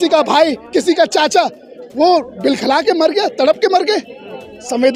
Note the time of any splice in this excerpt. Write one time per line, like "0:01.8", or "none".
none